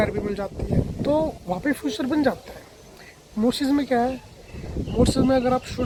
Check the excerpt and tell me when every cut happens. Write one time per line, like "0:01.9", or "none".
none